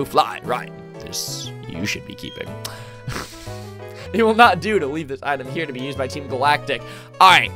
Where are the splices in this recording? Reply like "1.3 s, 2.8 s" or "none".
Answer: 4.0 s